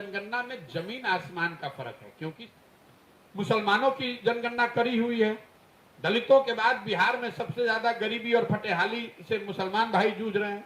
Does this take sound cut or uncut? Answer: cut